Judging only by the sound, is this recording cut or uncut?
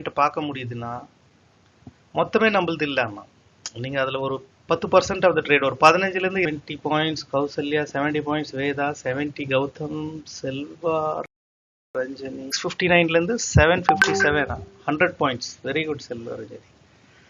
cut